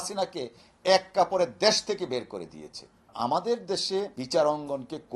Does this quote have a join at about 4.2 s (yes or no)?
yes